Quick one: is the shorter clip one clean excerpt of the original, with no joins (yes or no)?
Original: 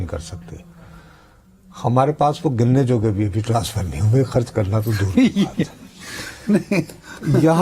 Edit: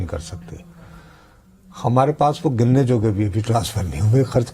yes